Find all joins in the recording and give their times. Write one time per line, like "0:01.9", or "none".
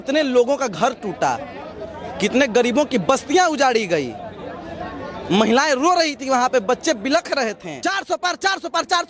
0:07.7